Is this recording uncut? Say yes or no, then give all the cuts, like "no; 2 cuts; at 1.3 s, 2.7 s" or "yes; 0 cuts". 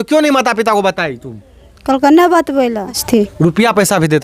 no; 1 cut; at 3.0 s